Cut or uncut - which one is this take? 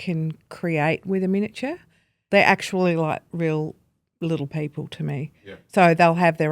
cut